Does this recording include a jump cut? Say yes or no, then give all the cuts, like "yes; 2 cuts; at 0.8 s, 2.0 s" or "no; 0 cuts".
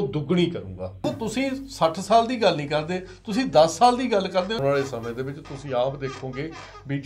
yes; 2 cuts; at 1.0 s, 4.6 s